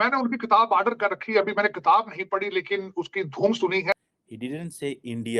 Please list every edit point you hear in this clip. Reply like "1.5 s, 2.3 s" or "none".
3.9 s

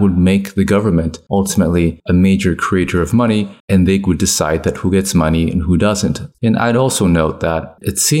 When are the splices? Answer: 1.2 s, 2.0 s, 6.3 s

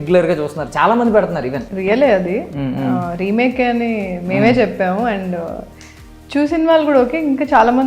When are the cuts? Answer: 1.7 s

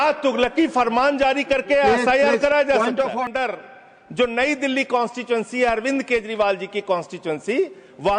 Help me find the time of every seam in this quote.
3.3 s

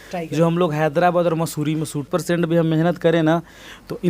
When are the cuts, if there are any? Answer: 2.1 s

